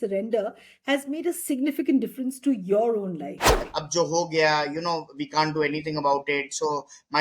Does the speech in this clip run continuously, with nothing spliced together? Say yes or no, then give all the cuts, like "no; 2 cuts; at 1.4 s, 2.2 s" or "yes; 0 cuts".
no; 1 cut; at 3.6 s